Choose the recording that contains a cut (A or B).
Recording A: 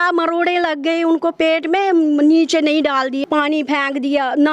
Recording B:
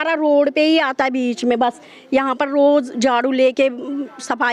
A